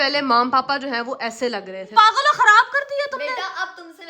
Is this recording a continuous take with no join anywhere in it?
no; 1 cut; at 1.8 s

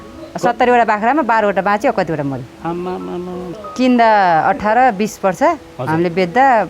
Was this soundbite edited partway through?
yes; 1 cut; at 3.4 s

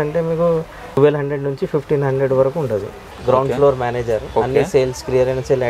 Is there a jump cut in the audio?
yes; 2 cuts; at 1.0 s, 3.0 s

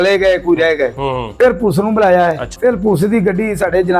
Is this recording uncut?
no; 2 cuts; at 1.3 s, 2.5 s

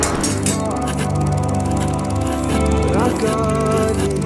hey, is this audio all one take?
yes; 0 cuts

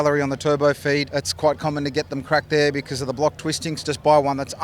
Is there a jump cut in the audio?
yes; 2 cuts; at 1.1 s, 3.7 s

